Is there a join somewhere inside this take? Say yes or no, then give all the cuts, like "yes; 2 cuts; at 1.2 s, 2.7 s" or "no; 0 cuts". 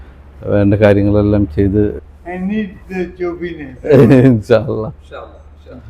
yes; 1 cut; at 2.0 s